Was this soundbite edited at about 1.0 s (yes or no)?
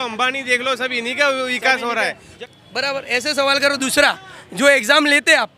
no